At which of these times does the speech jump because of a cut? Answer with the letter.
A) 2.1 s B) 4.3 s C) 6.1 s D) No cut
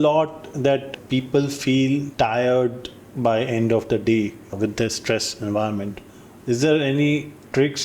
A